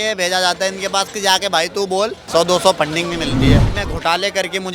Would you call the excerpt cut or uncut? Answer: cut